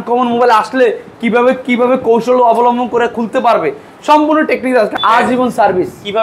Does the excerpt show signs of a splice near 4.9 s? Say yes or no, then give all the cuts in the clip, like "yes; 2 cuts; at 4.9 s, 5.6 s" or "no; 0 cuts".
yes; 1 cut; at 4.9 s